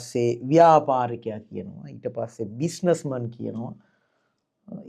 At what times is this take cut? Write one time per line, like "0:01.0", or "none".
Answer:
none